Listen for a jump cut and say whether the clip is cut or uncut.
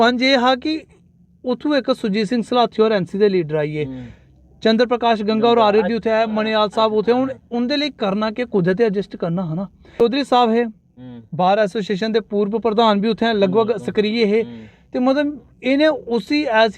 cut